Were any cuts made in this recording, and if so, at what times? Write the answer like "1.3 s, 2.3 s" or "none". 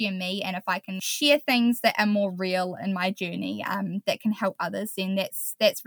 1.0 s